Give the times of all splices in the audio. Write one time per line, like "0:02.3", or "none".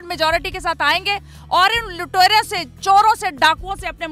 none